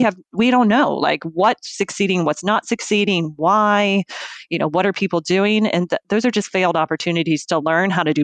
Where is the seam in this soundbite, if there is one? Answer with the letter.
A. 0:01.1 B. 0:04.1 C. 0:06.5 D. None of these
D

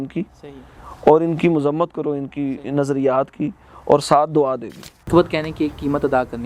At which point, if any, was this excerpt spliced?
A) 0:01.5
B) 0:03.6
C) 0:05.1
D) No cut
C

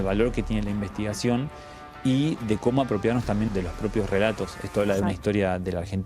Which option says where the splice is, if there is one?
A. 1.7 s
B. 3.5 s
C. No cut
B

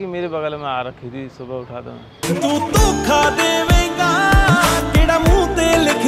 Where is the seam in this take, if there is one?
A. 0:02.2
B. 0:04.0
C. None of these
C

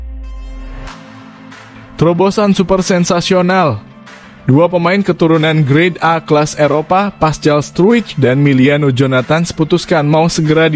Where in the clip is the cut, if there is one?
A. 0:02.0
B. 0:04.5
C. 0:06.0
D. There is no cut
A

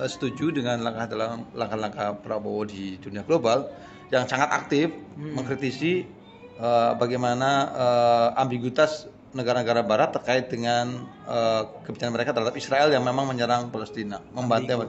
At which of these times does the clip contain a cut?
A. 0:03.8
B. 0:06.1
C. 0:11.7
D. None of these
D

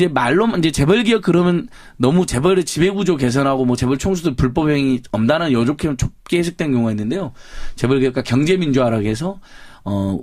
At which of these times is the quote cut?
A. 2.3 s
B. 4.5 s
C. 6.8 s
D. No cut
A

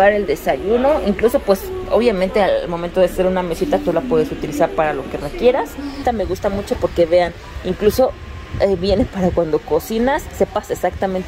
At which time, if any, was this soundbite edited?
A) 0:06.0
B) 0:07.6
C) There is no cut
A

